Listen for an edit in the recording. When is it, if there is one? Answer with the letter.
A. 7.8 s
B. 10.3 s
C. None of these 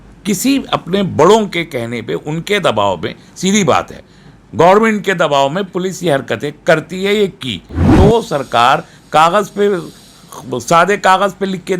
A